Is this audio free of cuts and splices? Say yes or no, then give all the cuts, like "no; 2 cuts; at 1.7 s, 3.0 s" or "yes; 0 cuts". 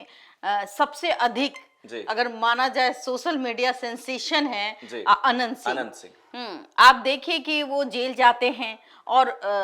yes; 0 cuts